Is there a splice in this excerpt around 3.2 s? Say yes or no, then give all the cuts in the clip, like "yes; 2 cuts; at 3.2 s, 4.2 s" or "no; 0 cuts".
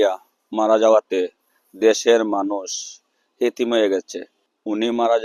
no; 0 cuts